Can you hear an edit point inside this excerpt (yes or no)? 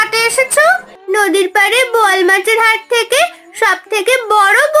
yes